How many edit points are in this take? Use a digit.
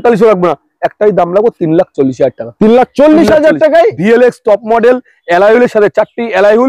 0